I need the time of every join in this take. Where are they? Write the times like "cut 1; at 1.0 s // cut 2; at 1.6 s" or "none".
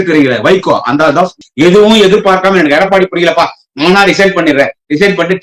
cut 1; at 1.4 s